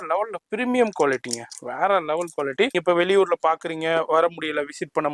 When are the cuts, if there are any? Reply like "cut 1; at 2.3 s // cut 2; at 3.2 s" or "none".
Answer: cut 1; at 2.8 s

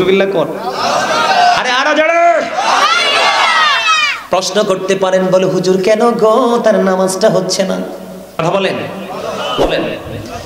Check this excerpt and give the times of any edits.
cut 1; at 8.3 s

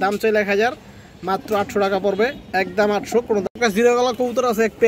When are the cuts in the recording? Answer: cut 1; at 3.7 s

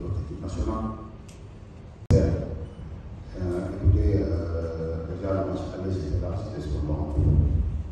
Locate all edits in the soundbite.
cut 1; at 2.1 s

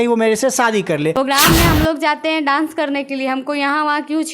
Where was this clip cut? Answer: cut 1; at 1.1 s

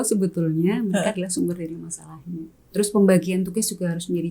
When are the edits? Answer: cut 1; at 2.6 s

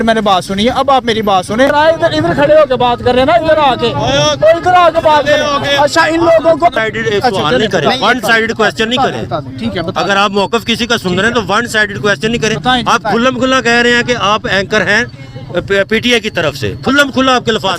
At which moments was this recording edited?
cut 1; at 1.7 s // cut 2; at 6.8 s

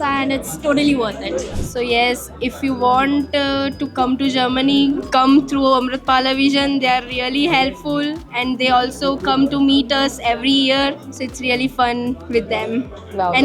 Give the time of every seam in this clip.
cut 1; at 1.5 s

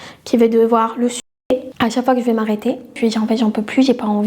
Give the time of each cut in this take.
cut 1; at 1.2 s // cut 2; at 2.9 s

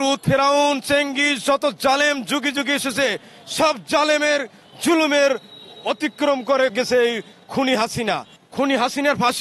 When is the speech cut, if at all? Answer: cut 1; at 6.7 s // cut 2; at 8.3 s

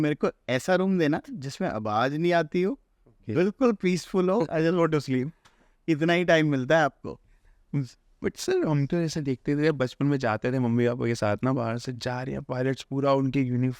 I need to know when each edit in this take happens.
none

